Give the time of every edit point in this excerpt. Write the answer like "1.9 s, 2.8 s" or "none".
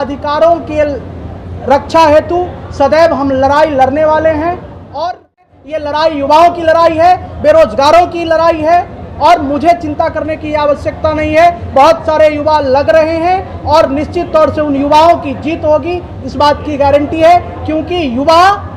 5.8 s